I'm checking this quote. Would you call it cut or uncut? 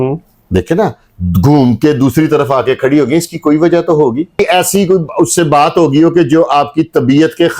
cut